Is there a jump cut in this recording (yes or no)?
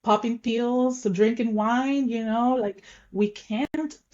no